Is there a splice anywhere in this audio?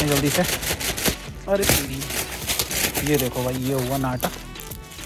no; 0 cuts

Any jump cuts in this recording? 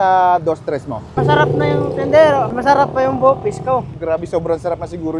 yes; 1 cut; at 3.9 s

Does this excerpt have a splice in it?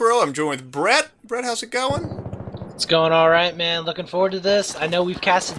no; 0 cuts

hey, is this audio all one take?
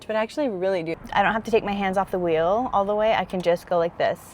no; 1 cut; at 0.9 s

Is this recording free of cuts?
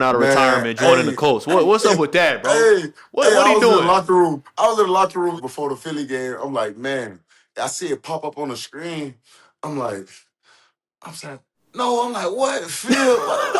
yes; 0 cuts

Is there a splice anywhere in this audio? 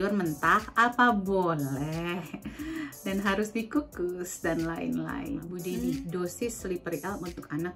yes; 1 cut; at 5.5 s

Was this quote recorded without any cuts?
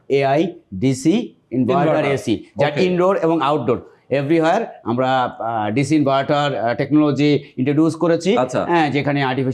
yes; 0 cuts

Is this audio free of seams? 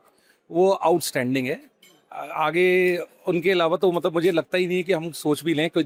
yes; 0 cuts

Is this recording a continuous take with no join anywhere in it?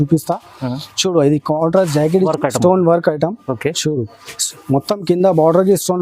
no; 1 cut; at 2.3 s

